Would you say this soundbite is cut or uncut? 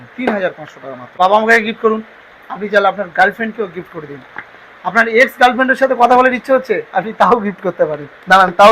cut